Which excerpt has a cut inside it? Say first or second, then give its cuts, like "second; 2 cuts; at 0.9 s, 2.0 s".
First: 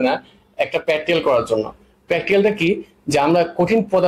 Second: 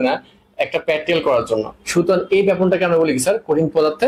second; 1 cut; at 1.8 s